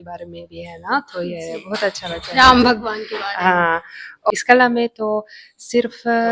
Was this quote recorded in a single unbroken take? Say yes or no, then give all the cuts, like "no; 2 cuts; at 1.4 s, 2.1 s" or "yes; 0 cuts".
no; 1 cut; at 4.3 s